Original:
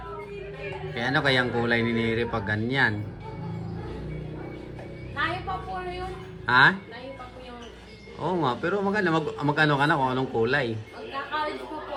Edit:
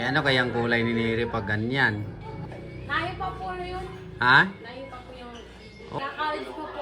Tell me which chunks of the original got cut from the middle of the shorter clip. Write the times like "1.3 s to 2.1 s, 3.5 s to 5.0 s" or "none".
3.4 s to 4.7 s, 8.1 s to 11.0 s